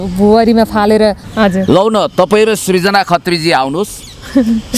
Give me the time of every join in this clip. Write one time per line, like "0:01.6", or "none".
0:01.2

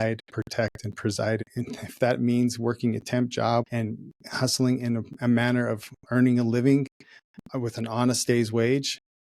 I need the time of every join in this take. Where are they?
0:01.5
0:03.7

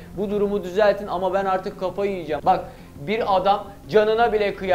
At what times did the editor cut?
0:02.3

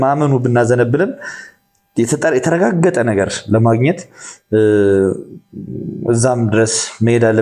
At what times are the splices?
none

